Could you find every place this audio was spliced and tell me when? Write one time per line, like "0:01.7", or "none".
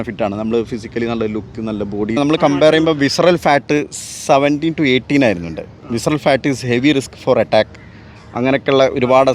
0:02.2